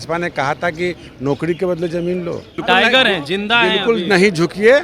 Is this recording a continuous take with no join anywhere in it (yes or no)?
no